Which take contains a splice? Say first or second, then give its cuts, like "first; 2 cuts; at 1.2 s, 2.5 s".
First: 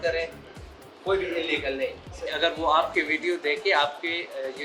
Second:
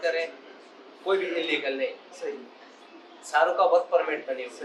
first; 1 cut; at 2.1 s